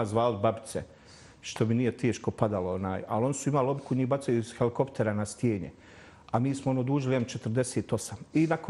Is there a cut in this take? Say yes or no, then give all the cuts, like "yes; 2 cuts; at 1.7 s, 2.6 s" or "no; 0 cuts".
no; 0 cuts